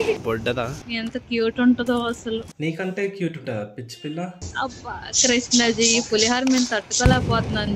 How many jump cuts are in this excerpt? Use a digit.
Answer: 1